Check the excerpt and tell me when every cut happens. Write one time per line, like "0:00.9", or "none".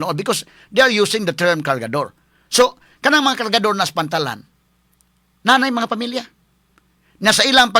none